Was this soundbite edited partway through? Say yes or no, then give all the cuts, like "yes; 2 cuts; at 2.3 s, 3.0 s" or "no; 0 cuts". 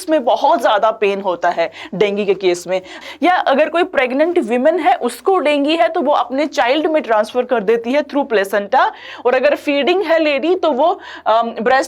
yes; 1 cut; at 3.0 s